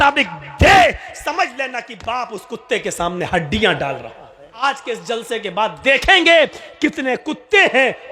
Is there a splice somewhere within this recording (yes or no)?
yes